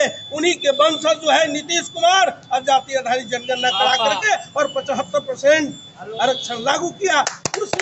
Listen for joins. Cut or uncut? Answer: uncut